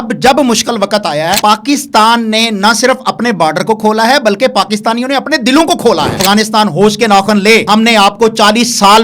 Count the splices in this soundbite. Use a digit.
3